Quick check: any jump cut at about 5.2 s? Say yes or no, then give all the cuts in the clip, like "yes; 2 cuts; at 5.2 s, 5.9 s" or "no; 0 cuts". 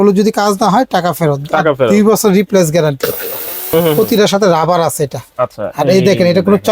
no; 1 cut; at 4.0 s